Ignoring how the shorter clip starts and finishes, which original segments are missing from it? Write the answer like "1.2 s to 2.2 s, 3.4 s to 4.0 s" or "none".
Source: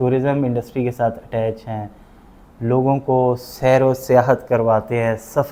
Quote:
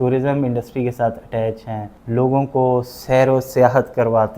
1.9 s to 2.5 s

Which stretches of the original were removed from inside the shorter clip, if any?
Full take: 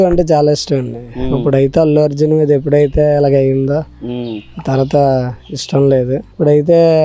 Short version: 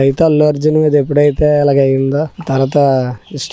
3.9 s to 4.5 s

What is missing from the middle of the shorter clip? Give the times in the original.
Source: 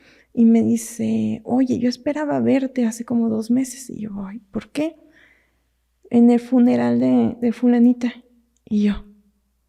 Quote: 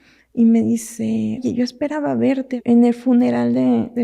1.4 s to 1.7 s, 2.8 s to 6.1 s

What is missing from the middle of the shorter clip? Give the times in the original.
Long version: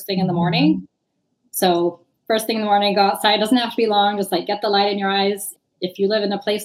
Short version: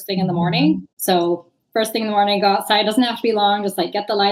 0.9 s to 1.4 s

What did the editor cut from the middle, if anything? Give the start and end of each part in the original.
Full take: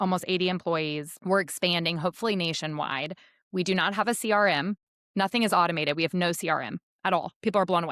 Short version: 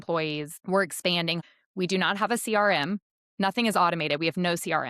2.0 s to 3.2 s

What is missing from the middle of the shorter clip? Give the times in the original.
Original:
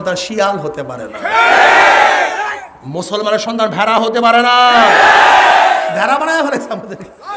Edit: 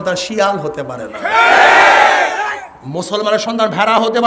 none

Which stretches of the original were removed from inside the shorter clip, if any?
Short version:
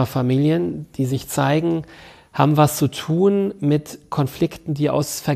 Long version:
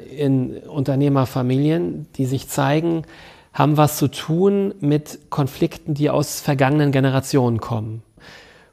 none

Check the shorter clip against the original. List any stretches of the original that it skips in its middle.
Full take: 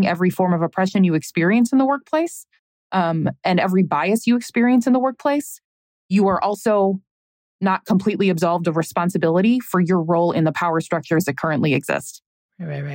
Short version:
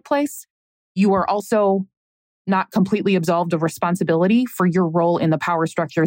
none

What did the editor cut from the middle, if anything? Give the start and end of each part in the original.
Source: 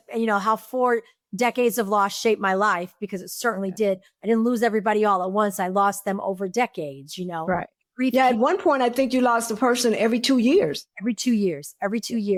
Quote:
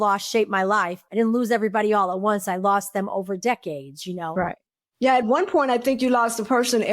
2.9 s to 4.1 s

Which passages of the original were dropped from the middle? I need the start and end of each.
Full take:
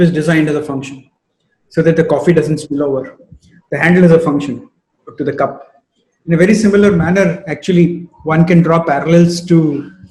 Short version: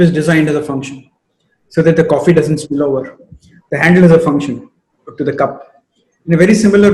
none

